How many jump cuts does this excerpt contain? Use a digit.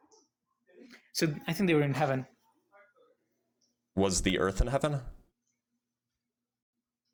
0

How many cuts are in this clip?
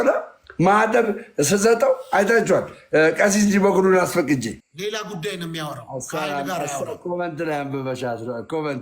1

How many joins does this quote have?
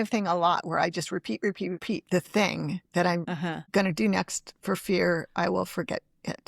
2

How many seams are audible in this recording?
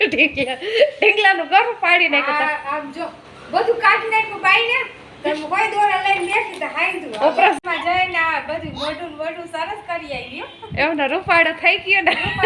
1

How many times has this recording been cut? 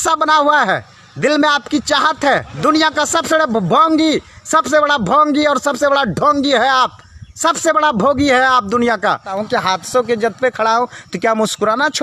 2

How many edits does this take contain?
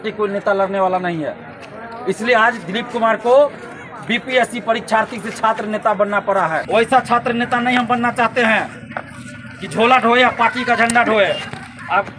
1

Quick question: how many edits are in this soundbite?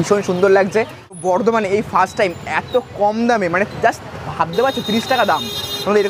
1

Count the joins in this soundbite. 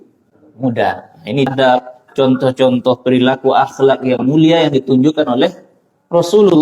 1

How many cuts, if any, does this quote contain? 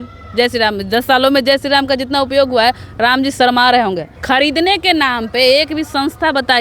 1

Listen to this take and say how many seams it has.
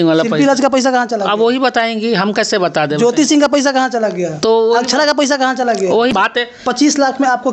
1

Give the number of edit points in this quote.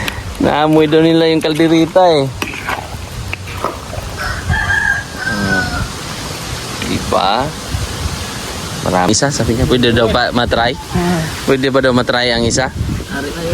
1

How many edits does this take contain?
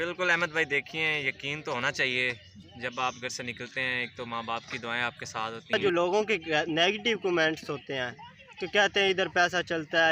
1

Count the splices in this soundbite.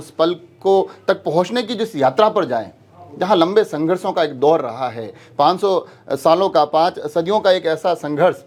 0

